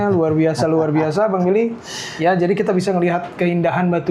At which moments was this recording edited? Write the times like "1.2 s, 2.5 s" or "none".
none